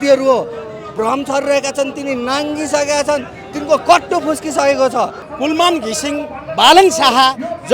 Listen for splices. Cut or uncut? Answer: cut